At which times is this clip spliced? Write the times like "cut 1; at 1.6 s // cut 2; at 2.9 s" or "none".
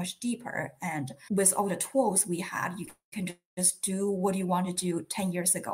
cut 1; at 1.2 s